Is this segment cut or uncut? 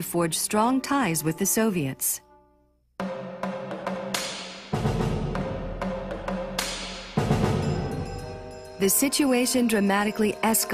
cut